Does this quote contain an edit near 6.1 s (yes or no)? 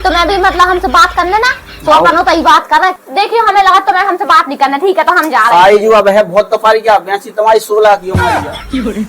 no